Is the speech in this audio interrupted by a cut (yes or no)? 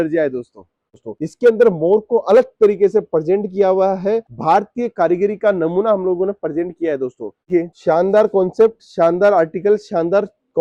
yes